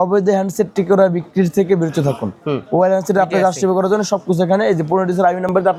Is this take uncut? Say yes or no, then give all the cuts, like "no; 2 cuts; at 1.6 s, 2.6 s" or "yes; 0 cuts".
yes; 0 cuts